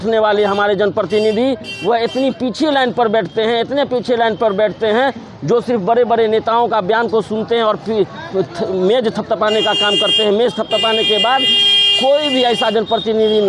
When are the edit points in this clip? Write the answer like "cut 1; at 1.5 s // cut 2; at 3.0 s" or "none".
none